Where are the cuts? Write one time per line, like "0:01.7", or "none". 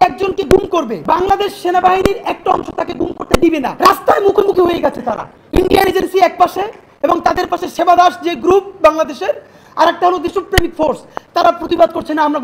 none